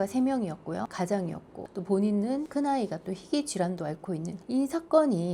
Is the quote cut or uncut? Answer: cut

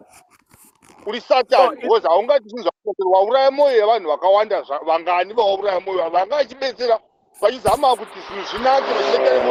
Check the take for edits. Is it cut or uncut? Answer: uncut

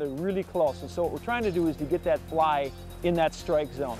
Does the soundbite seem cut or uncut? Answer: cut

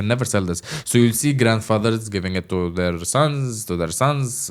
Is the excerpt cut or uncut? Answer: uncut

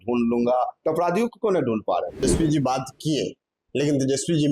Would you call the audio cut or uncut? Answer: cut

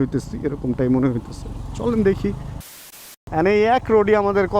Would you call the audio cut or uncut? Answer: cut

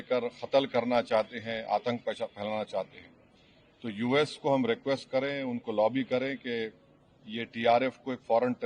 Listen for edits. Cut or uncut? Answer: uncut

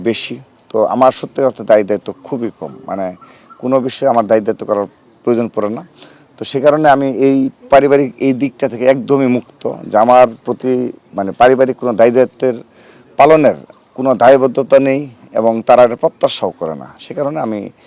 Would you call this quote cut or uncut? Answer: uncut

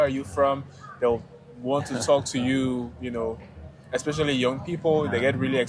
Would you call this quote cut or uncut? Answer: uncut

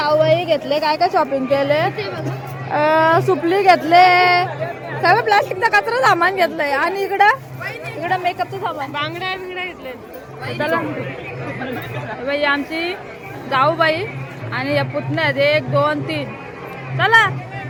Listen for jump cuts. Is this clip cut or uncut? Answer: uncut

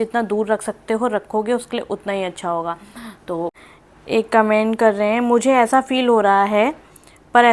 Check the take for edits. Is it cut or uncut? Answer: cut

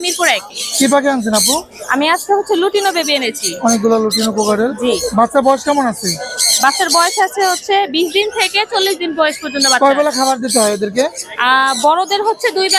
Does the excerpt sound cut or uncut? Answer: uncut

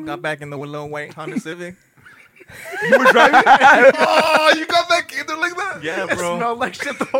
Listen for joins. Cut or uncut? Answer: uncut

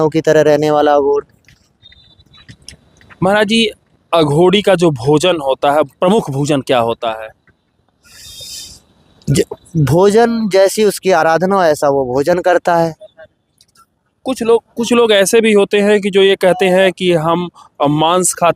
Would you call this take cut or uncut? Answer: uncut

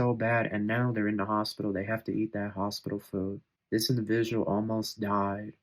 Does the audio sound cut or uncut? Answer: cut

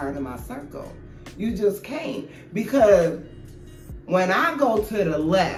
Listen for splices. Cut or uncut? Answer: uncut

